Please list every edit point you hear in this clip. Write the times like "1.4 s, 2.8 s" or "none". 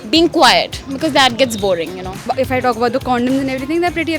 2.3 s

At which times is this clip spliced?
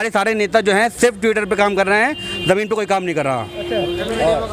none

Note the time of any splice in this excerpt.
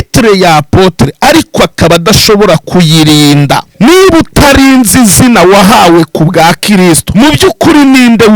3.7 s, 7.1 s

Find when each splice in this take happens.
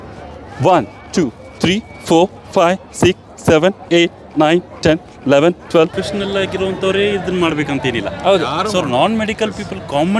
6.0 s

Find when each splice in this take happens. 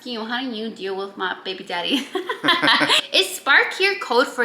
3.0 s

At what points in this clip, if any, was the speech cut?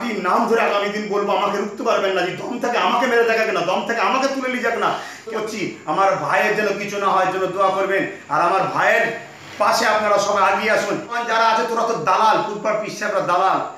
5.3 s, 11.1 s

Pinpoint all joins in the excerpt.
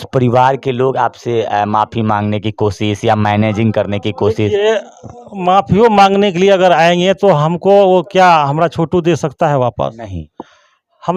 none

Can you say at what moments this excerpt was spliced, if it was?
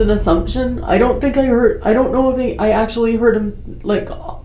none

